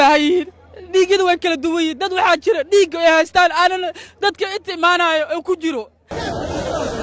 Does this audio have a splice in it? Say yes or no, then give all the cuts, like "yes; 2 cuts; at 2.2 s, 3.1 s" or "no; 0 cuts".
yes; 1 cut; at 5.9 s